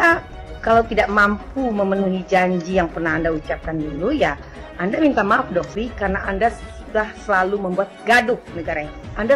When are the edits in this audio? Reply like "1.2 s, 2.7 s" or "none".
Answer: 5.8 s